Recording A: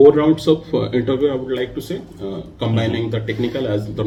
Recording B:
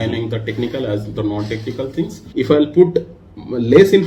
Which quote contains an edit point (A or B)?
B